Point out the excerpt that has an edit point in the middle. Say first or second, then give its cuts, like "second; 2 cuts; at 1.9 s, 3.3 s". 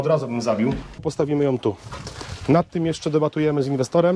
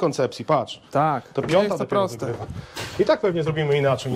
first; 1 cut; at 1.0 s